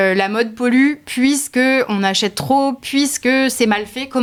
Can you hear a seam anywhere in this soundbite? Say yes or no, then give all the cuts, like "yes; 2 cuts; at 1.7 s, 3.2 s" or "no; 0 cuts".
no; 0 cuts